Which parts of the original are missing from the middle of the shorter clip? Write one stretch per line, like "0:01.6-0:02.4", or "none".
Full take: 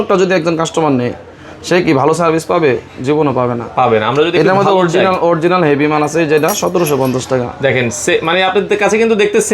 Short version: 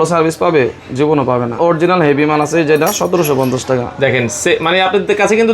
0:03.6-0:05.2